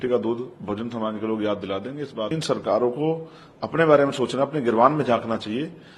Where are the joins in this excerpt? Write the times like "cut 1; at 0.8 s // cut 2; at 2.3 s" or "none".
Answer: cut 1; at 2.4 s